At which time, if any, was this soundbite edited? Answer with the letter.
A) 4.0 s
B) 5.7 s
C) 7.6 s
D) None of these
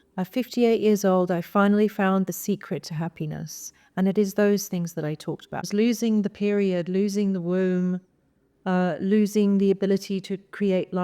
B